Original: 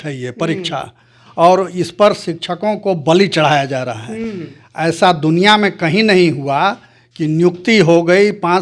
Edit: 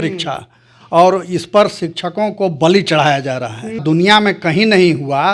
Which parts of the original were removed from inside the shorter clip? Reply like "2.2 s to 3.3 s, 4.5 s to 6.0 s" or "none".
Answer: 4.3 s to 5.2 s

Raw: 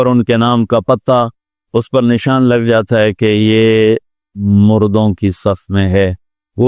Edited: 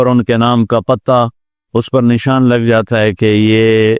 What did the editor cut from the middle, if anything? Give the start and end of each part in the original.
none

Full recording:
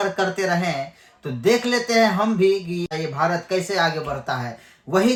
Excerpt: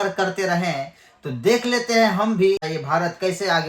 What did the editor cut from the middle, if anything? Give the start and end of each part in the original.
2.6 s to 2.9 s

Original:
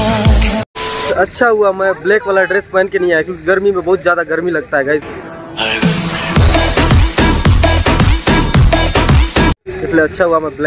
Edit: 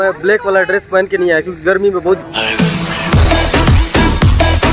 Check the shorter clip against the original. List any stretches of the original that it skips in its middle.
4.0 s to 5.4 s

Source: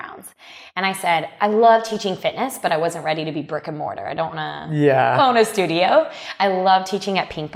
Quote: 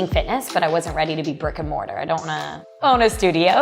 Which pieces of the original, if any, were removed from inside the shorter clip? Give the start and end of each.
4.8 s to 5.1 s

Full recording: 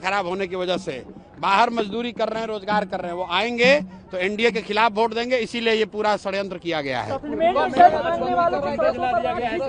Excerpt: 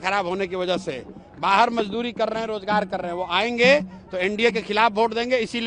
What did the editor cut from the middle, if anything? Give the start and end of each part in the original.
none

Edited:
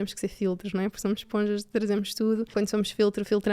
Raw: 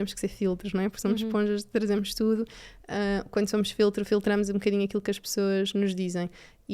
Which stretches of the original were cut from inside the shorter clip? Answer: 2.5 s to 3.3 s

